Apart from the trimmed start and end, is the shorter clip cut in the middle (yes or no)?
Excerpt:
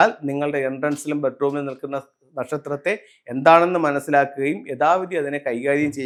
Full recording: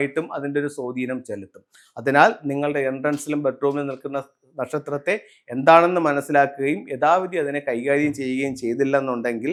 no